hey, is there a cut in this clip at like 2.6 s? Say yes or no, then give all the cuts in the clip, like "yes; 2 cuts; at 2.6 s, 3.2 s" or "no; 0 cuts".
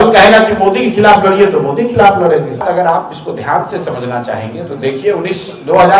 yes; 1 cut; at 2.6 s